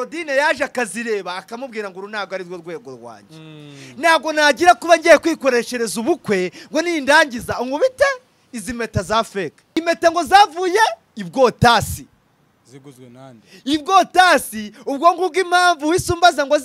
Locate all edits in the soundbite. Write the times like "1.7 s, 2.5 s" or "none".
9.8 s

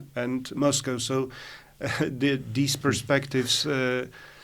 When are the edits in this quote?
2.8 s

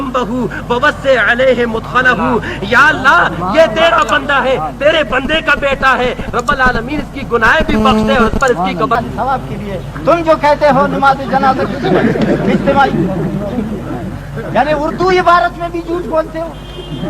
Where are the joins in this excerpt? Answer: 9.0 s

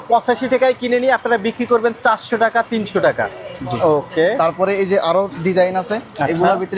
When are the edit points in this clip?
none

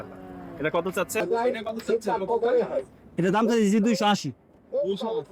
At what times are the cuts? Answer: 1.2 s

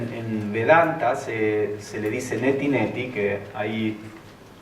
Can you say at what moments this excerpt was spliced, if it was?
2.4 s

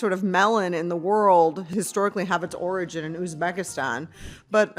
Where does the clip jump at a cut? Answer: 1.6 s

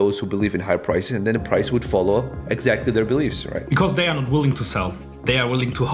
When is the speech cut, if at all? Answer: none

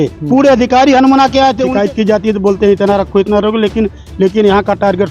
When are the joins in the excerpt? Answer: 1.7 s

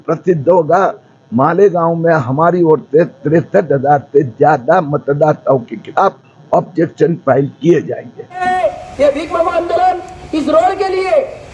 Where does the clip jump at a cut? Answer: 8.4 s

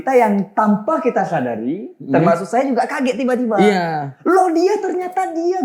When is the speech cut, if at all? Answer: none

